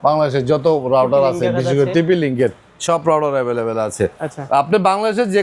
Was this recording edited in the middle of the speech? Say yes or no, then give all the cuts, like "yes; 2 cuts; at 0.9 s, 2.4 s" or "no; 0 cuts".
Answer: no; 0 cuts